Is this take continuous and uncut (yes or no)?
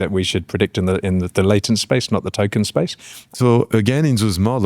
no